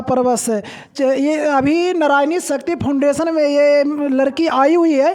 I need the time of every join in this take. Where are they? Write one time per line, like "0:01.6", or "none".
none